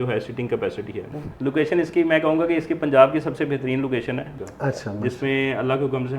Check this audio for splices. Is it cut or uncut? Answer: cut